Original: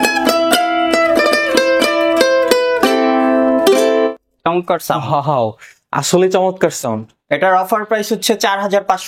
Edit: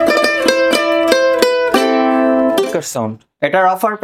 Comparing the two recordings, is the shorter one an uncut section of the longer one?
no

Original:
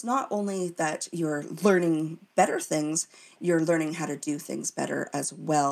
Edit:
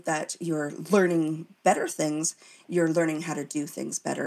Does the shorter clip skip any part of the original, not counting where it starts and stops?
no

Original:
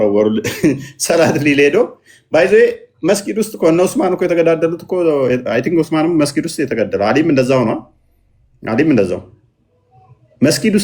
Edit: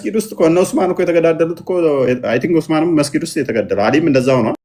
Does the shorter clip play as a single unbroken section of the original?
yes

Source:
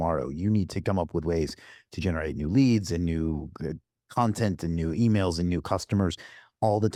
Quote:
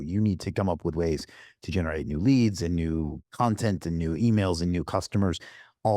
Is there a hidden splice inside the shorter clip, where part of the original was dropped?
yes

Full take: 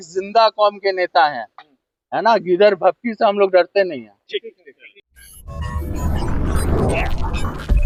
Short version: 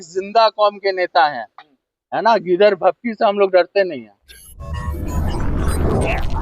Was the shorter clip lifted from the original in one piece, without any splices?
no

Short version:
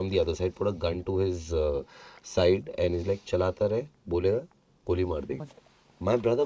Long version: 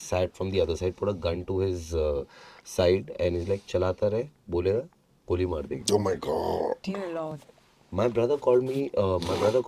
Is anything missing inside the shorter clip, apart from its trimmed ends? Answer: yes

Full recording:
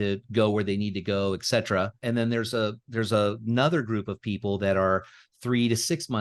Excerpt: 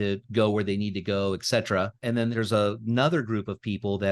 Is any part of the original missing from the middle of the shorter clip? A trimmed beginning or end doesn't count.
yes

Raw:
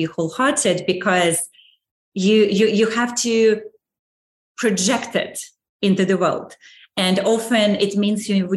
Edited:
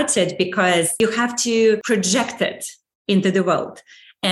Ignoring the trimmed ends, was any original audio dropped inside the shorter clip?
yes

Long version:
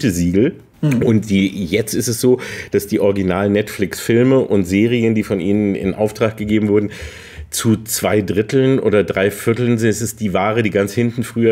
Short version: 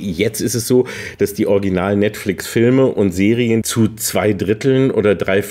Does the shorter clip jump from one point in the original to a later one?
yes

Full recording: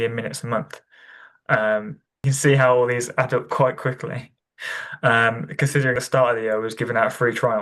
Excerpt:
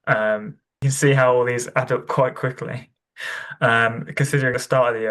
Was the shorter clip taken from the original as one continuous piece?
yes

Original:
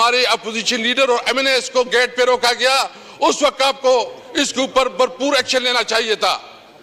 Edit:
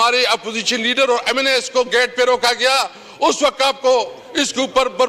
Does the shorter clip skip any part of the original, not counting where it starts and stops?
no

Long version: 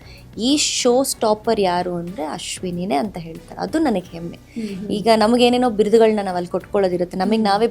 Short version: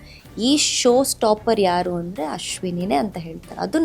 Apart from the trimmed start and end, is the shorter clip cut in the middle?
no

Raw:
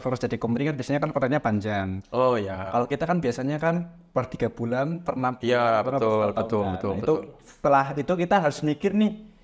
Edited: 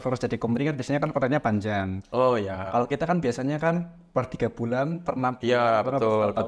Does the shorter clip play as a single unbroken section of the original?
yes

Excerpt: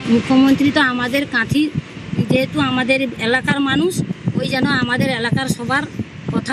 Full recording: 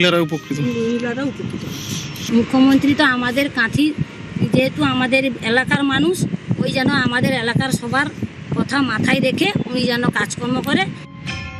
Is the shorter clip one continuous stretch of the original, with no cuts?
yes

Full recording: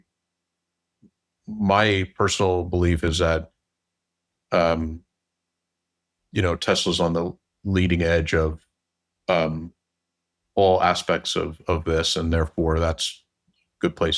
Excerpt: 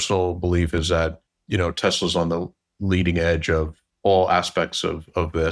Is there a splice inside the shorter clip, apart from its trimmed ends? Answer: yes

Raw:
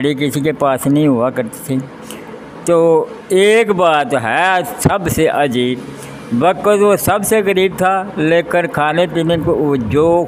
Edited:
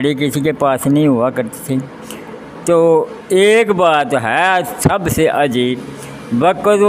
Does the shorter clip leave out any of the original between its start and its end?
no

